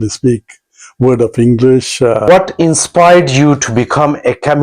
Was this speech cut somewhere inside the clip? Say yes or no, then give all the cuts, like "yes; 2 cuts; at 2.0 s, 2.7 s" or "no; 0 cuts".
yes; 1 cut; at 2.3 s